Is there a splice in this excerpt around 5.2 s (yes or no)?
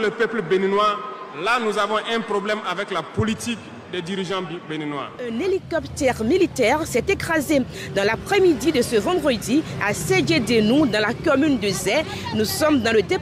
yes